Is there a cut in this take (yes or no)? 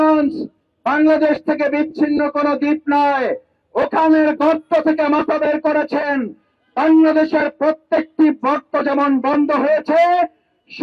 no